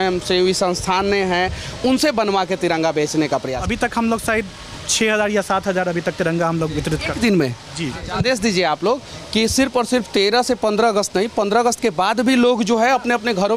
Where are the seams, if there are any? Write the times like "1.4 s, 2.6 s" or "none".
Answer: 3.5 s, 8.1 s